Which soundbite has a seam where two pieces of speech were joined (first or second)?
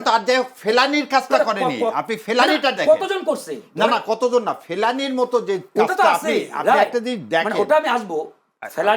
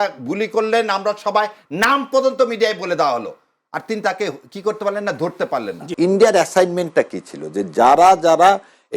second